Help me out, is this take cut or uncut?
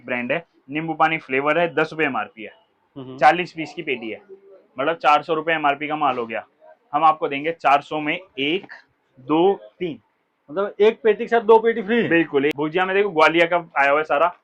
cut